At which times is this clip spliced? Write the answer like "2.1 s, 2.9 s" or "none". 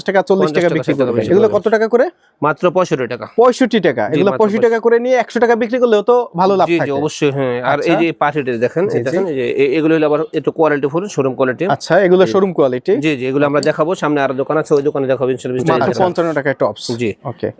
1.2 s, 9.2 s, 15.8 s